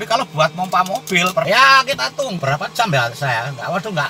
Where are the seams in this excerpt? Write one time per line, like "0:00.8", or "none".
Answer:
0:01.5
0:02.4